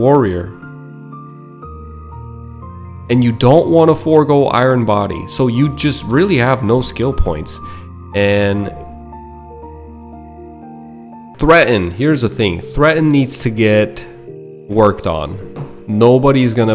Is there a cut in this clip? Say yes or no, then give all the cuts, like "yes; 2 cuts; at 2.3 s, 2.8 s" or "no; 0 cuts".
yes; 1 cut; at 11.3 s